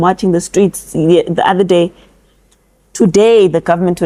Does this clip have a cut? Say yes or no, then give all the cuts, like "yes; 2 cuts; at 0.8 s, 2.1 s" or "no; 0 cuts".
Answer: no; 0 cuts